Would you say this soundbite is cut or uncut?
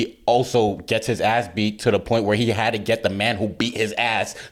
uncut